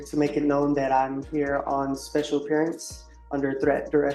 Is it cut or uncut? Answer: uncut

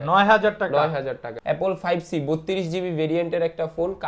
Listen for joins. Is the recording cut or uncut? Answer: cut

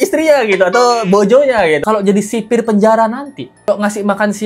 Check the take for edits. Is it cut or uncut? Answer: cut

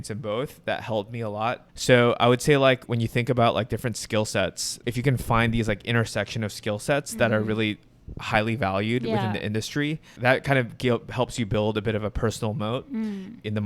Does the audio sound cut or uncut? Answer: cut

